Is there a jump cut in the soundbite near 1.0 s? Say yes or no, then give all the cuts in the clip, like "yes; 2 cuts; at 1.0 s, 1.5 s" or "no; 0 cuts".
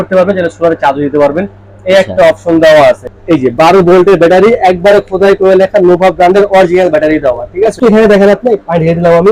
no; 2 cuts; at 3.1 s, 7.8 s